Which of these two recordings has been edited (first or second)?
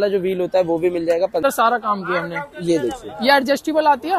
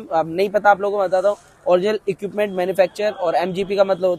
first